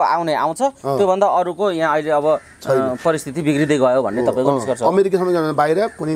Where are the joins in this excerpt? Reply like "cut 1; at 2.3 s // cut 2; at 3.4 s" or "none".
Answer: none